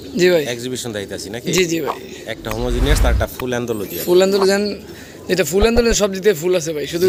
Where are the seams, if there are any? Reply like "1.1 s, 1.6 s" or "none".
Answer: none